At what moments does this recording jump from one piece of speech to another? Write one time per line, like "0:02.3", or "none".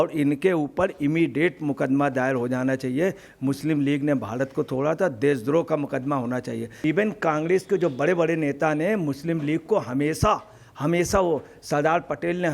0:06.7